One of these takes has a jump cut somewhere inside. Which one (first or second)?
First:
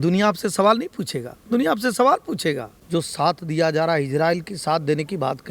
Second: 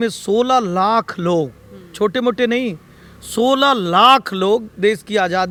first